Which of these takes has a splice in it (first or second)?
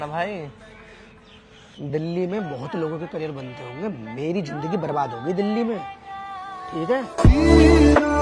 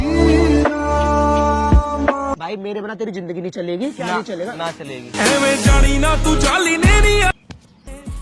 second